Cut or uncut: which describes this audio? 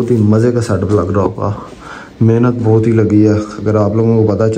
uncut